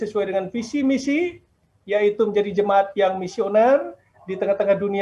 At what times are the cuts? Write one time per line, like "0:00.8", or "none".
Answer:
none

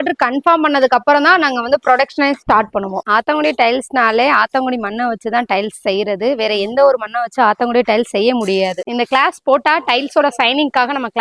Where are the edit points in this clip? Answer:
0:03.0
0:08.8

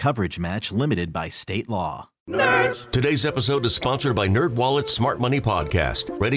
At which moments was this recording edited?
0:02.1

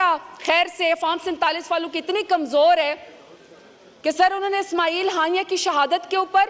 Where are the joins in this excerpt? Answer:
none

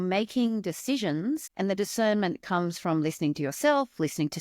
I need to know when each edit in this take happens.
0:01.5

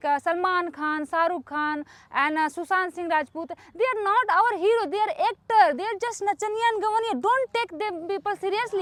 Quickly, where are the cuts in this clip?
none

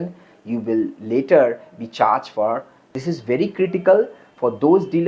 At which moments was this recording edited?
0:03.0

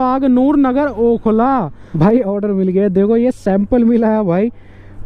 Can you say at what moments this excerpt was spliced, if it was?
0:02.0

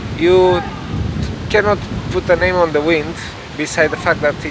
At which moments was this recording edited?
none

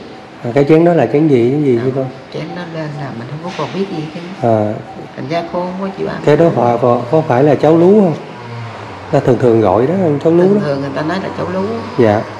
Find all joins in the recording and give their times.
none

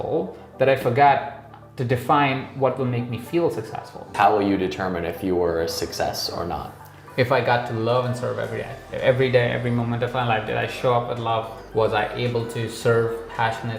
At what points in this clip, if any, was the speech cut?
0:04.1
0:08.8
0:11.6

